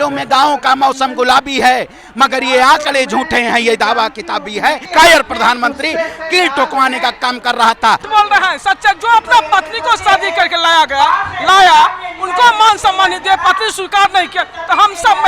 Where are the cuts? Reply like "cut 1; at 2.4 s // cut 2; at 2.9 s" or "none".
cut 1; at 4.8 s // cut 2; at 8.0 s